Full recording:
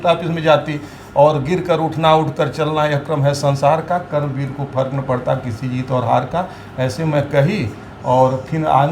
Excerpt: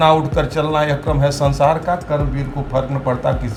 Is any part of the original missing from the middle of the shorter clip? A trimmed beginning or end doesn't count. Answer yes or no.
no